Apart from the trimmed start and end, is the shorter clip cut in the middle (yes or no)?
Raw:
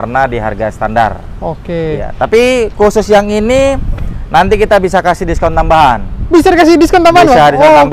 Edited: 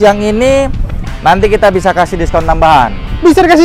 no